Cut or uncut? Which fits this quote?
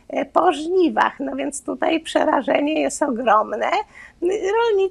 uncut